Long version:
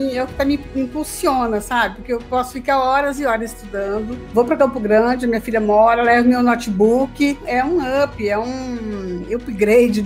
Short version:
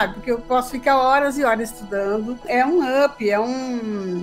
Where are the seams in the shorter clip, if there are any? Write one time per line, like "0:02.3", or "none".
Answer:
0:02.4